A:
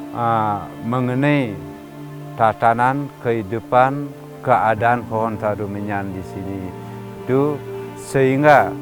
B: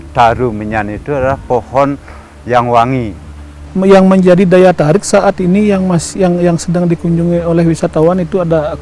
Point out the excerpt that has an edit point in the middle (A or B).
B